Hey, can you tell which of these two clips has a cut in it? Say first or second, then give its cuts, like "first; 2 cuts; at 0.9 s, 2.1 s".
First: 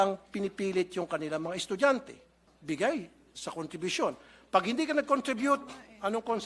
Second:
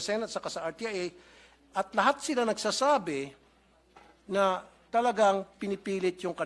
first; 1 cut; at 2.5 s